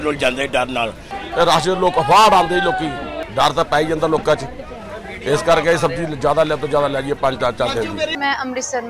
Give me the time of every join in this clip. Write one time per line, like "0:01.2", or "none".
0:01.2
0:03.2
0:08.1